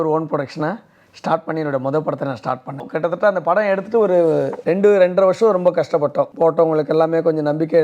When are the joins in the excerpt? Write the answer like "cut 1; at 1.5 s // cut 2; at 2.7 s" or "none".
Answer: cut 1; at 2.9 s // cut 2; at 4.6 s // cut 3; at 6.3 s